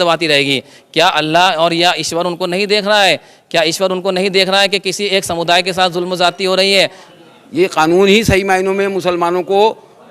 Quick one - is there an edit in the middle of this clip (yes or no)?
yes